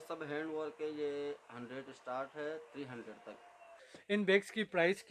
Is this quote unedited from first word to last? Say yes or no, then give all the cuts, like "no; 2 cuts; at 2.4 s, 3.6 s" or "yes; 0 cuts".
no; 1 cut; at 3.7 s